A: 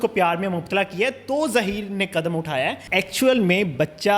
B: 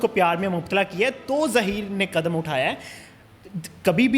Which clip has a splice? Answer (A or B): A